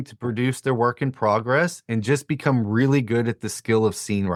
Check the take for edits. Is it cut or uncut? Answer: uncut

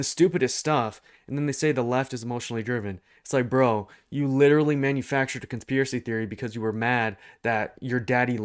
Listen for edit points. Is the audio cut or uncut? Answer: uncut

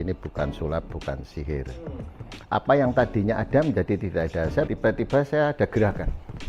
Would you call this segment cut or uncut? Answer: cut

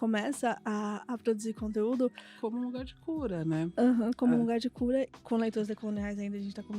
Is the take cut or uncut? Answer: cut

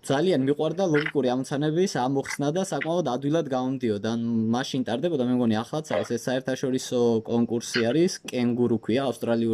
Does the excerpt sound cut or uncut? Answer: uncut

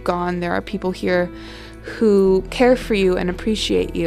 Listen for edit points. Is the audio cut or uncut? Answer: cut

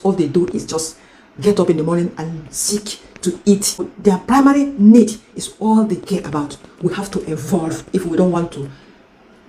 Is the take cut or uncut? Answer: cut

